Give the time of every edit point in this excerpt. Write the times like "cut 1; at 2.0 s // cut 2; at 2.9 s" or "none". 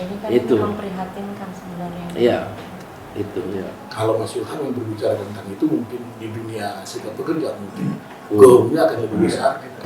cut 1; at 3.8 s